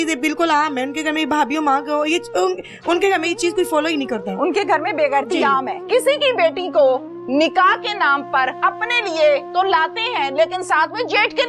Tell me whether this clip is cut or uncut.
cut